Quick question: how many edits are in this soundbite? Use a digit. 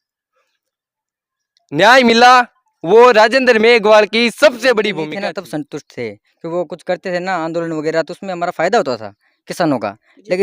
1